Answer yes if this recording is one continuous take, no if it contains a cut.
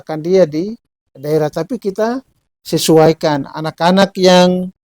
yes